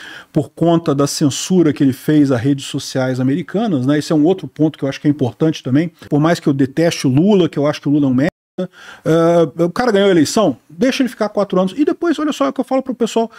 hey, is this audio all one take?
no; 1 cut; at 6.1 s

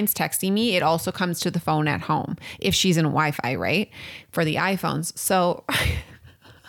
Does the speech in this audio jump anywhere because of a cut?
no; 0 cuts

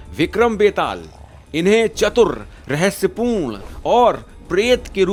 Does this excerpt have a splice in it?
no; 0 cuts

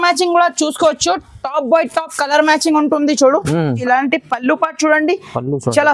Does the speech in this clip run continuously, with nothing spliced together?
no; 1 cut; at 3.8 s

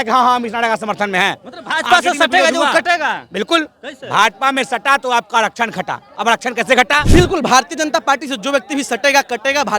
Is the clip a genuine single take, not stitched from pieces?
no; 1 cut; at 7.1 s

